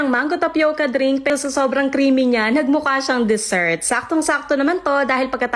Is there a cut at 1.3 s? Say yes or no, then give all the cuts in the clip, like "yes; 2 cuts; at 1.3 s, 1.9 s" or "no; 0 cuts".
yes; 1 cut; at 1.3 s